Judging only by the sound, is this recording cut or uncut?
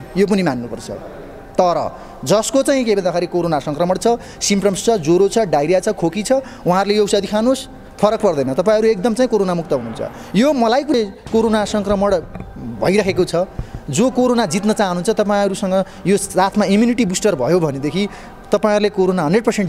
cut